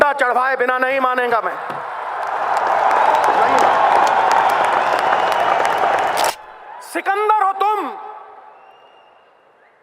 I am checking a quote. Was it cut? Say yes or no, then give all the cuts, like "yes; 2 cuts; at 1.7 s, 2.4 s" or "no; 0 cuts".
yes; 1 cut; at 6.3 s